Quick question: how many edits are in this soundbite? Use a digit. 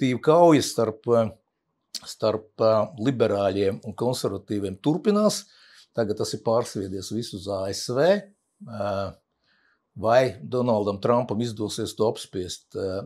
0